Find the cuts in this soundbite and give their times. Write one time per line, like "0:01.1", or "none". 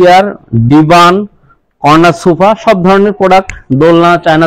none